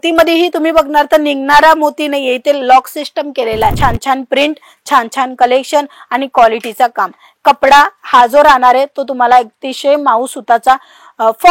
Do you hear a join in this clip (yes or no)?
yes